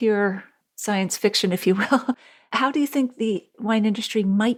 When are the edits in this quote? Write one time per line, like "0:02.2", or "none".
none